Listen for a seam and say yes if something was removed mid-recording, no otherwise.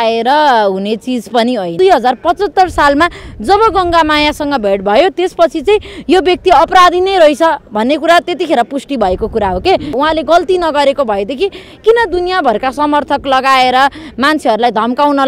yes